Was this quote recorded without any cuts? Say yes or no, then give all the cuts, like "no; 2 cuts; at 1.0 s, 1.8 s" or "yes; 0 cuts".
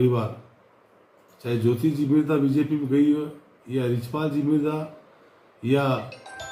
yes; 0 cuts